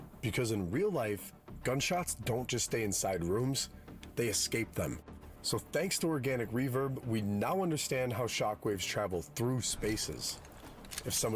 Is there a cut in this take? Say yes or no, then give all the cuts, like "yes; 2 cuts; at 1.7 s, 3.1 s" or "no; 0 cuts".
no; 0 cuts